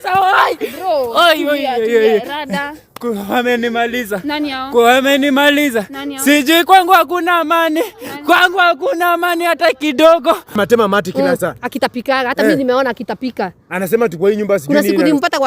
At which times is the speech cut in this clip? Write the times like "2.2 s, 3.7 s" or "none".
10.6 s